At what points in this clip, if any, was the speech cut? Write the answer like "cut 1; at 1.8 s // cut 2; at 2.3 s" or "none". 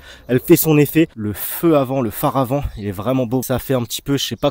cut 1; at 1.2 s // cut 2; at 3.4 s